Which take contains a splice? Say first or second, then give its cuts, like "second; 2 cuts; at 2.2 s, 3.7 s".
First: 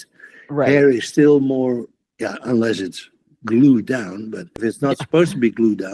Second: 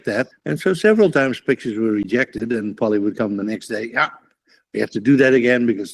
first; 2 cuts; at 2.0 s, 4.5 s